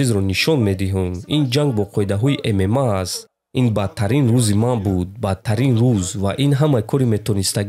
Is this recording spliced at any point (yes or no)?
yes